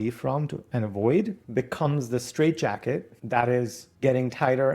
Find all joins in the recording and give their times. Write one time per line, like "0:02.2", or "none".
0:01.4
0:03.1
0:03.8